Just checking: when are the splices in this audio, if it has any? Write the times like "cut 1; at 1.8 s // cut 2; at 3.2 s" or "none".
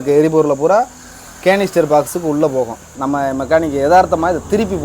cut 1; at 2.9 s